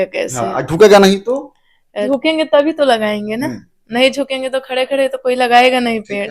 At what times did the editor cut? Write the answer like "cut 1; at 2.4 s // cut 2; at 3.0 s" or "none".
cut 1; at 2.0 s